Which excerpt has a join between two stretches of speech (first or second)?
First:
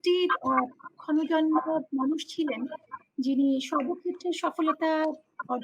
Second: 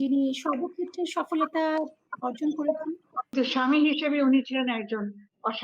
second